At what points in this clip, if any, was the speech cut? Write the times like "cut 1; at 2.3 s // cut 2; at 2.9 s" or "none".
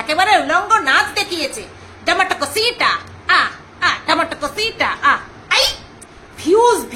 cut 1; at 5.9 s

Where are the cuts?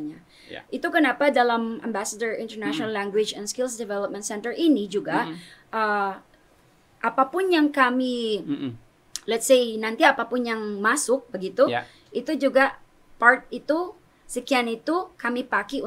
none

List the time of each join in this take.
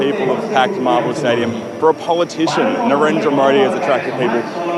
none

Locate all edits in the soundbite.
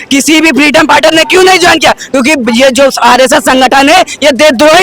none

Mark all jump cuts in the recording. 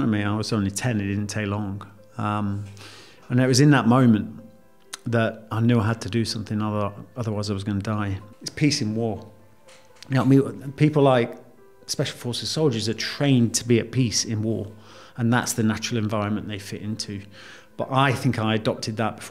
cut 1; at 8.2 s

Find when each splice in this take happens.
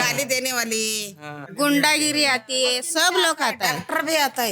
cut 1; at 1.3 s

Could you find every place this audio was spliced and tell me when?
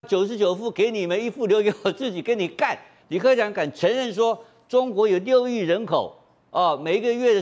cut 1; at 2.9 s

